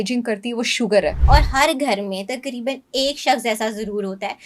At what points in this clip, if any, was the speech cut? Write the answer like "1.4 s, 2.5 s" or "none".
1.2 s